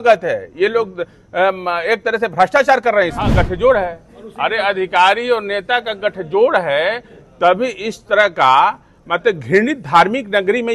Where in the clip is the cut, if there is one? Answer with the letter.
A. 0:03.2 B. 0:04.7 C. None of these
A